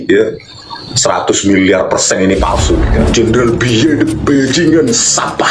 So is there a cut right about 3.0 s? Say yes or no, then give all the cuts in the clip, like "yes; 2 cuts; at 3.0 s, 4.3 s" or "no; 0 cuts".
yes; 1 cut; at 3.0 s